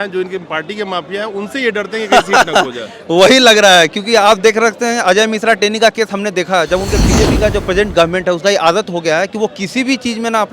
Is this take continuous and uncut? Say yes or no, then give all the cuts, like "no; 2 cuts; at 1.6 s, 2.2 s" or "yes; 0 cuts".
no; 1 cut; at 7.0 s